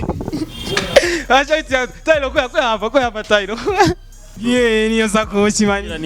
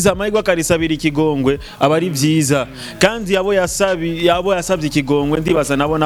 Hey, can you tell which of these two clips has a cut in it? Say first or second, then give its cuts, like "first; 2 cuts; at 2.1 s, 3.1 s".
first; 1 cut; at 4.3 s